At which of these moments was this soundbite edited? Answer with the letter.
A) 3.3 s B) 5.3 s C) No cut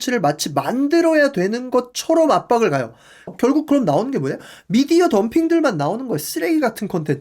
A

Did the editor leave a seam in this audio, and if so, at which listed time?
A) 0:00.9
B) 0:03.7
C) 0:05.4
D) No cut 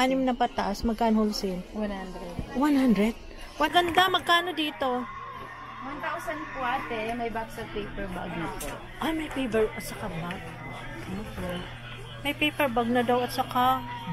B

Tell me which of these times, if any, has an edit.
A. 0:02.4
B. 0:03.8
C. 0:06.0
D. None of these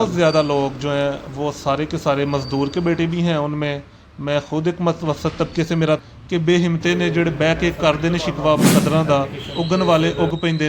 C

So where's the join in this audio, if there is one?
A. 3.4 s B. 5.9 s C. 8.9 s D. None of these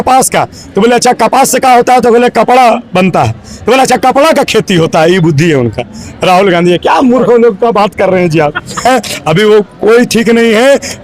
C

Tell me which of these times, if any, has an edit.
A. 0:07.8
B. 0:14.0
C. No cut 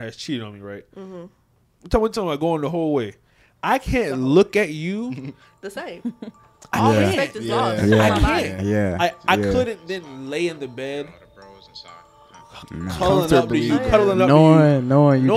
C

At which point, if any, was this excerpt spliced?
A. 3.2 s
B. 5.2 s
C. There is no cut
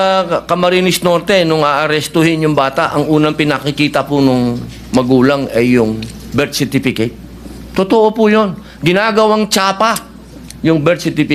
C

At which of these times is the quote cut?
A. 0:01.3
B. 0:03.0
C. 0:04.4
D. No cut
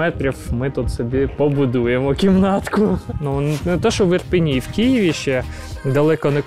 B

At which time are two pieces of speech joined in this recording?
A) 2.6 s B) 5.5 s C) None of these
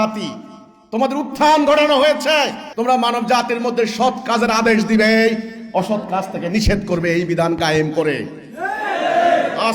A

